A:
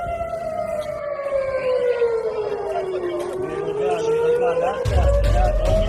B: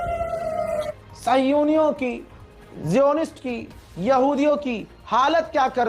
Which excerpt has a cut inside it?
B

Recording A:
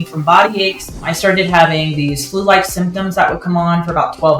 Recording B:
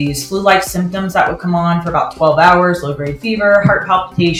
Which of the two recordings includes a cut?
A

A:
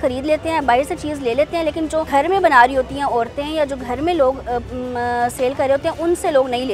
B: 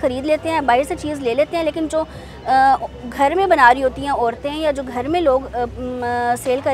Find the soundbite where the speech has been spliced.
A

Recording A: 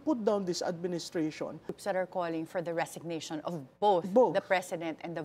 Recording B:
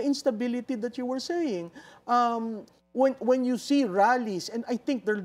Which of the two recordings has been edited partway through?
A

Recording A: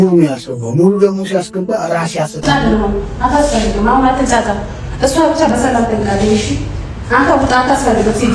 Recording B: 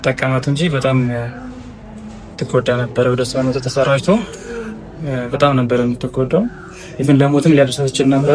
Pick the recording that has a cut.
A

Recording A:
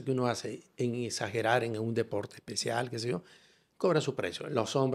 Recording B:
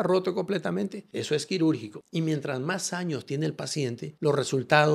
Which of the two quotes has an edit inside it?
B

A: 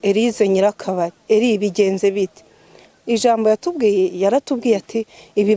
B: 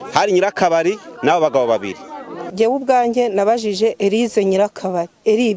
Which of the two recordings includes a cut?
B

